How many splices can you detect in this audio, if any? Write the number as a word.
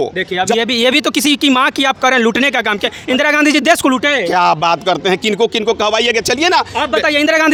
zero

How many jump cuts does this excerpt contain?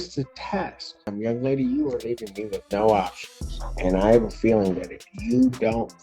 one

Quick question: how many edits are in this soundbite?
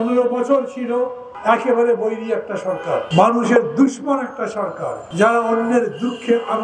three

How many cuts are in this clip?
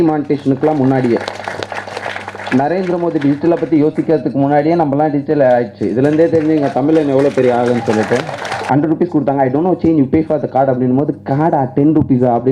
two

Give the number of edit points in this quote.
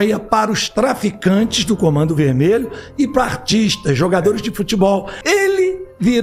one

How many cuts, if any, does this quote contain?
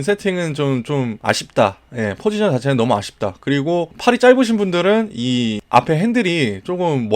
three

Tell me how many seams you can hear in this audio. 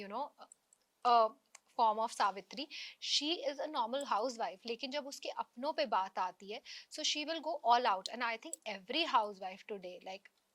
zero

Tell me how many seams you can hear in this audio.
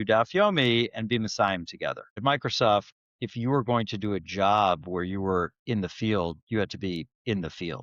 one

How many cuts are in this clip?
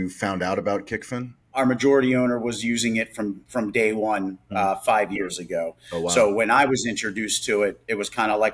one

